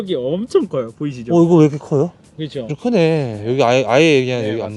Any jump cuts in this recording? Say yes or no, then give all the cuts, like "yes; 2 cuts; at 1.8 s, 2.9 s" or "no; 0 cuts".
yes; 1 cut; at 2.7 s